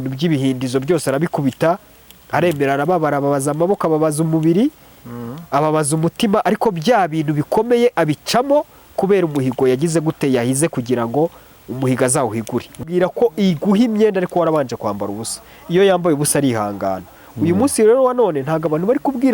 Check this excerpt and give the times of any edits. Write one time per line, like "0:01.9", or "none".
0:12.7